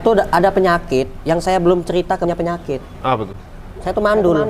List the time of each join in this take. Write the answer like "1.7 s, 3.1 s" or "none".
2.3 s